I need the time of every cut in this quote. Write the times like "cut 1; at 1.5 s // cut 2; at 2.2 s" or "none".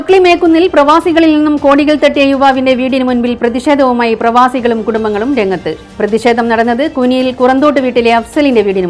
none